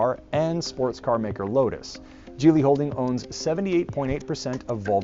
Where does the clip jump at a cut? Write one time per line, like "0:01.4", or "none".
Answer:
0:01.1